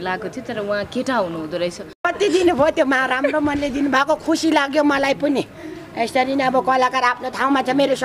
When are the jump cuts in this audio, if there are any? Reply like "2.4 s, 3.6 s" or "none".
2.1 s